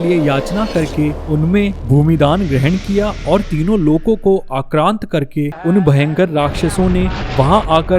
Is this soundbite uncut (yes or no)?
no